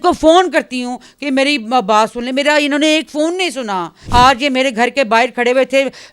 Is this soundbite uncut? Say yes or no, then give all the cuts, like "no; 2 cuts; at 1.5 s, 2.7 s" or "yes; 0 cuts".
no; 1 cut; at 4.0 s